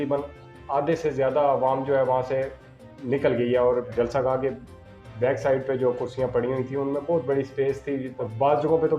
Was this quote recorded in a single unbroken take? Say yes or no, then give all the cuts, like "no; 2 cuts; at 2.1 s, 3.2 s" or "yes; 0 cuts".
no; 1 cut; at 8.1 s